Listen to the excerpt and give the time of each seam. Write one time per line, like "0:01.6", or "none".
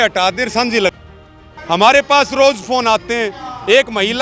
0:01.5

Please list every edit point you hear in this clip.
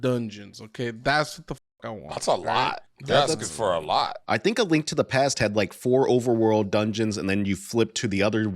0:02.9
0:04.2

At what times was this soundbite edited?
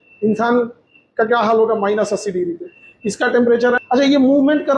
0:03.8

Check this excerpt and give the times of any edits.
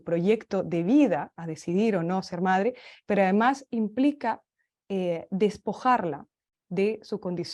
none

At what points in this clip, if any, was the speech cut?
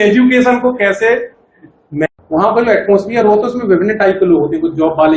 0:02.0

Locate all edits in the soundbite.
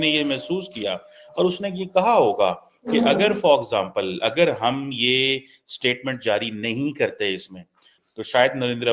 0:08.0

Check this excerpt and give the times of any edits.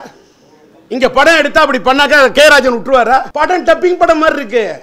0:03.3

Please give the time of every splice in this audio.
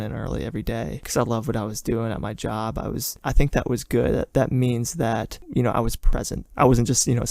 0:03.2
0:05.4
0:06.4

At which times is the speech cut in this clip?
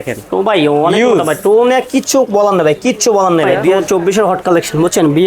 0:03.7

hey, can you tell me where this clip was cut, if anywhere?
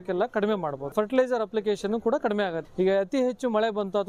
0:00.9
0:02.6

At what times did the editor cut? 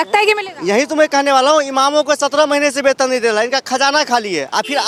none

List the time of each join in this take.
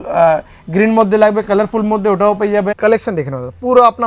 0:02.7

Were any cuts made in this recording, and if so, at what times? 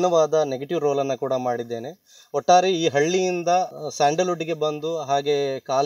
0:03.7

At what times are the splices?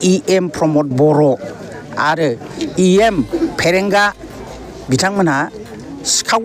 none

